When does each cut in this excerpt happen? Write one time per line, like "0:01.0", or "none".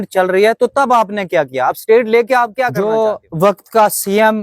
0:02.7